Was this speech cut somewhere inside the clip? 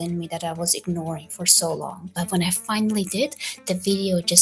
yes; 1 cut; at 2.0 s

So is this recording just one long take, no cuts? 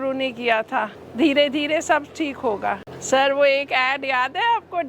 no; 2 cuts; at 1.0 s, 2.9 s

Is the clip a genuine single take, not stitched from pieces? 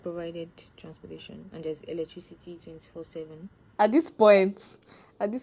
no; 1 cut; at 3.6 s

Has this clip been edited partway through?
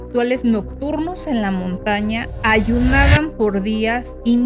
no; 0 cuts

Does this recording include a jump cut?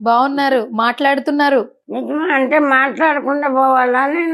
no; 0 cuts

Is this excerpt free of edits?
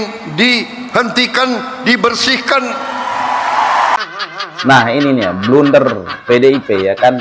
no; 1 cut; at 4.0 s

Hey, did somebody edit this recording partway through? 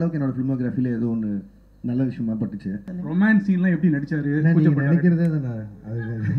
yes; 1 cut; at 2.9 s

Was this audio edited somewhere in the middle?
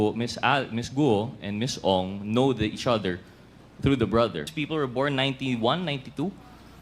yes; 1 cut; at 4.5 s

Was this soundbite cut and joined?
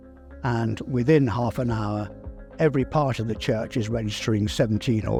no; 0 cuts

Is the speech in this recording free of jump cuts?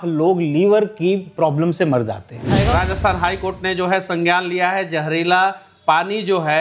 no; 1 cut; at 2.4 s

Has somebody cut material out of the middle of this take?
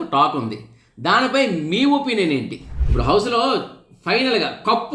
yes; 1 cut; at 2.8 s

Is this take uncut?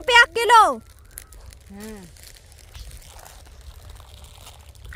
yes; 0 cuts

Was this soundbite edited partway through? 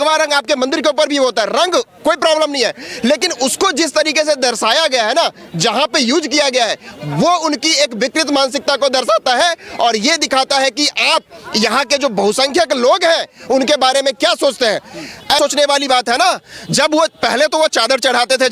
yes; 1 cut; at 15.4 s

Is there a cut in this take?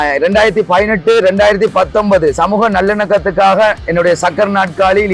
no; 0 cuts

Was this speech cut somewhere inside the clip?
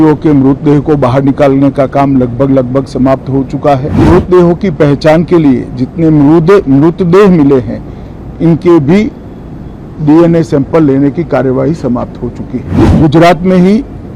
yes; 2 cuts; at 4.0 s, 12.8 s

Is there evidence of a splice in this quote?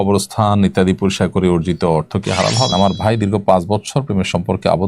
yes; 1 cut; at 2.7 s

